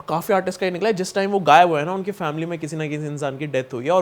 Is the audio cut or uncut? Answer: uncut